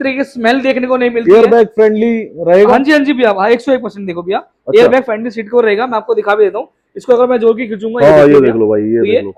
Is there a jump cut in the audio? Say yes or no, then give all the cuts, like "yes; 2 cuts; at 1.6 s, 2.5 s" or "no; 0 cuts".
no; 0 cuts